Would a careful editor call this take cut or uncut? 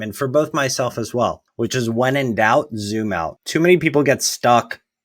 cut